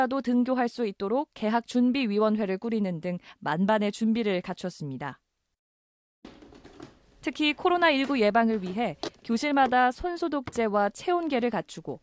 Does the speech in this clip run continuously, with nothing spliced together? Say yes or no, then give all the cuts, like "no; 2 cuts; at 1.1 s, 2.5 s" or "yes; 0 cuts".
yes; 0 cuts